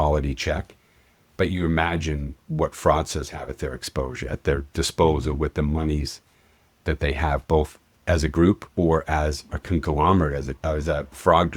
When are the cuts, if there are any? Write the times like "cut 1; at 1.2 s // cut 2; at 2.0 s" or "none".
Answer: cut 1; at 10.5 s